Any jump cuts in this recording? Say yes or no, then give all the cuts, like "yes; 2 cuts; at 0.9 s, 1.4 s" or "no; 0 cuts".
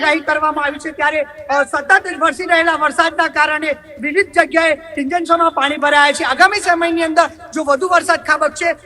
no; 0 cuts